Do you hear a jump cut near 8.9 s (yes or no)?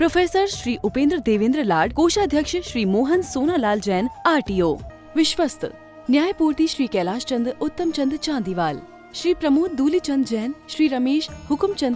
no